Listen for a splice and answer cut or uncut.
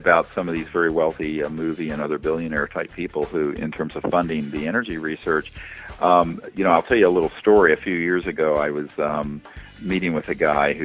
uncut